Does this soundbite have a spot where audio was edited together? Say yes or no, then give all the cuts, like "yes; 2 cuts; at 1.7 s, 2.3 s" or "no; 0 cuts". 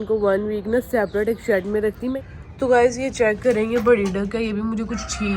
yes; 1 cut; at 2.1 s